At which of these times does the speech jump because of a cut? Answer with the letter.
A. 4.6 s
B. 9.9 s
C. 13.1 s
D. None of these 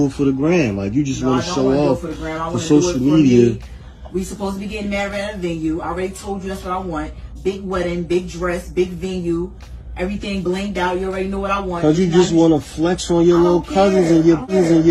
D